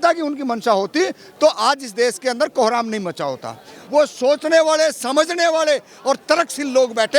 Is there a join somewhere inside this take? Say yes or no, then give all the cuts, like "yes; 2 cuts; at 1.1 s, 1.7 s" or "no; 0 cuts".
yes; 1 cut; at 3.7 s